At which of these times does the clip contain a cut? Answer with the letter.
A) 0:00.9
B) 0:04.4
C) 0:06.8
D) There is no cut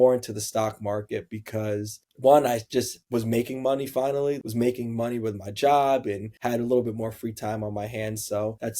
B